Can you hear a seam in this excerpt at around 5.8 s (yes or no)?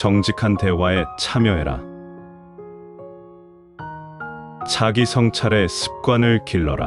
no